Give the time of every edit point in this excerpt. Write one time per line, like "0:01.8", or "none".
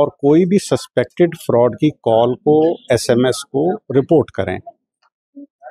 none